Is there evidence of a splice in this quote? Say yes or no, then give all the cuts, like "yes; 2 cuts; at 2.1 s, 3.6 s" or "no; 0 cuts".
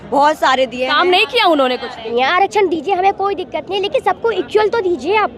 yes; 1 cut; at 2.1 s